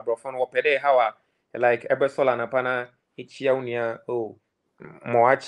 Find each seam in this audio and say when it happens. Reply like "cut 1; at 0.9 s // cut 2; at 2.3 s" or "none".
none